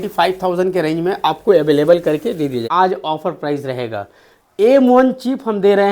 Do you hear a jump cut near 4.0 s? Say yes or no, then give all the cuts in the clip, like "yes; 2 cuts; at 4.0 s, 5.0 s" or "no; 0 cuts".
no; 1 cut; at 2.6 s